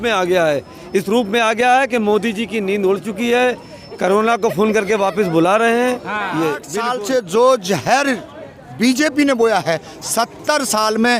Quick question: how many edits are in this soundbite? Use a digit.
1